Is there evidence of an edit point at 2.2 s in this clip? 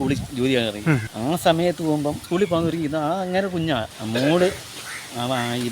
yes; 3 cuts; at 1.1 s, 2.2 s, 3.9 s

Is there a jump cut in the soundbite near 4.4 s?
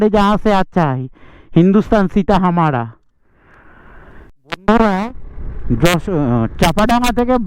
yes; 1 cut; at 4.4 s

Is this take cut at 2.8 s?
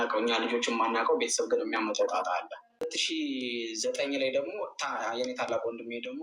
yes; 1 cut; at 2.8 s

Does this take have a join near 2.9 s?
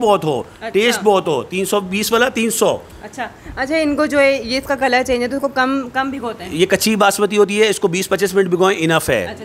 no; 0 cuts

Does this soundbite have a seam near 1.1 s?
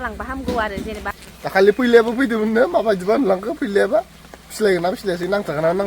yes; 1 cut; at 1.1 s

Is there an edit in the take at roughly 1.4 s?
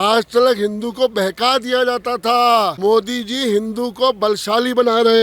no; 1 cut; at 2.8 s

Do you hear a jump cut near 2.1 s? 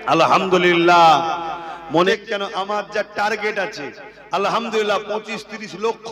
yes; 1 cut; at 2.1 s

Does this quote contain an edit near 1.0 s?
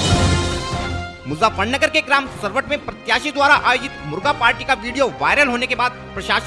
yes; 1 cut; at 1.0 s

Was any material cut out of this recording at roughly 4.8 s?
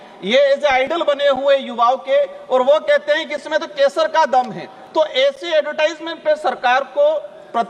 no; 0 cuts

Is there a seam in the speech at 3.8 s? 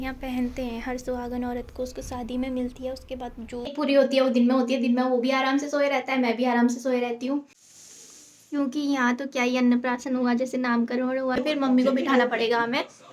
yes; 3 cuts; at 3.8 s, 7.6 s, 11.4 s

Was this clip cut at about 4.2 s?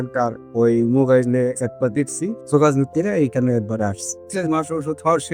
yes; 2 cuts; at 2.4 s, 4.2 s

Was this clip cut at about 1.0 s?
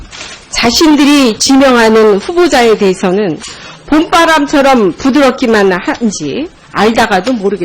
no; 1 cut; at 6.2 s

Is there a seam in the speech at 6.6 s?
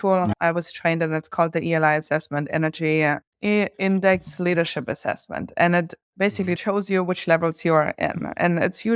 yes; 1 cut; at 6.6 s

